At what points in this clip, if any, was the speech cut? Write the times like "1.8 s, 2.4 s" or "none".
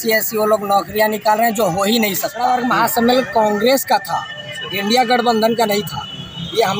2.5 s

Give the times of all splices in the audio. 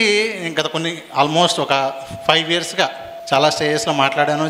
3.1 s

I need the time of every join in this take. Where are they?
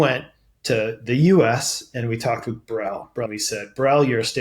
3.3 s

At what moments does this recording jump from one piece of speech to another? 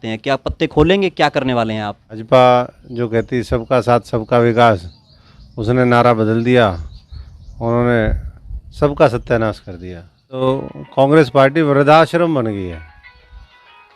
2.2 s, 10.4 s

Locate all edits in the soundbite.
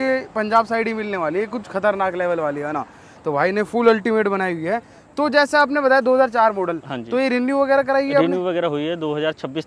none

